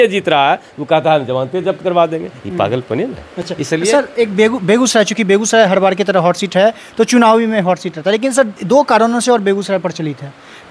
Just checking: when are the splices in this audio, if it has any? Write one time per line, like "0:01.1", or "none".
none